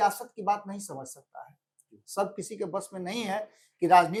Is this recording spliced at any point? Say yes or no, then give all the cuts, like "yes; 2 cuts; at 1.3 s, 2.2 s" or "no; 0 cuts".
no; 0 cuts